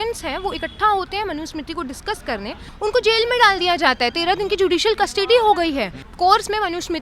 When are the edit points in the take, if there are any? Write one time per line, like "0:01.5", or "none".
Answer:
0:02.6
0:06.0